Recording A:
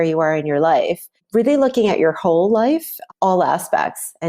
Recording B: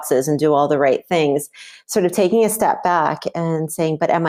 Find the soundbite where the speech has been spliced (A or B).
A